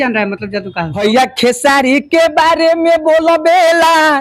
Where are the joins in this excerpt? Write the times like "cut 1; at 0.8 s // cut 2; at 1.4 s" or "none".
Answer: cut 1; at 1.0 s